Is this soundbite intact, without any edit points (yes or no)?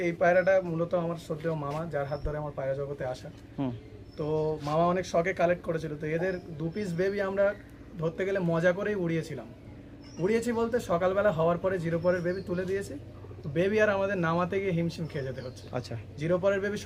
yes